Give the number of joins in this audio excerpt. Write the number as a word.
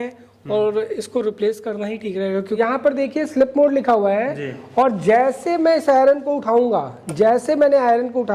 one